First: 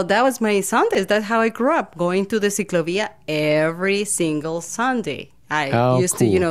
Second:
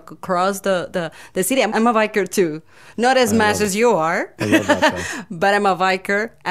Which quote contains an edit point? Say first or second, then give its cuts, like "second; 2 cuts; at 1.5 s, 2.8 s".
second; 1 cut; at 1.7 s